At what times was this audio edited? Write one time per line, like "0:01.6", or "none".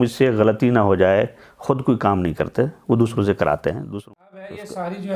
0:03.9